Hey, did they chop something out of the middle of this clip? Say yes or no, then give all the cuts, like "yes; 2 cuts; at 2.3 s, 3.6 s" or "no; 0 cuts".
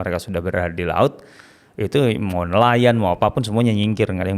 no; 0 cuts